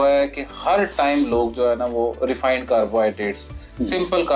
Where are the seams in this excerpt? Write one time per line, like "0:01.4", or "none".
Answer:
none